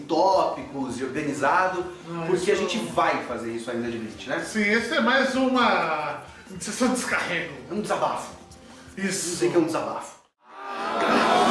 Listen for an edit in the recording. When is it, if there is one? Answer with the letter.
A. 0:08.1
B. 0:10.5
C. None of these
C